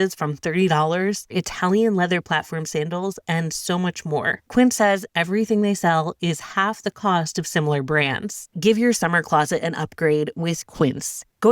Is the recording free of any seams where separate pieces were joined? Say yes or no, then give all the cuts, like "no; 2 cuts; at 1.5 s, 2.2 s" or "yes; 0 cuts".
no; 3 cuts; at 1.3 s, 4.5 s, 8.4 s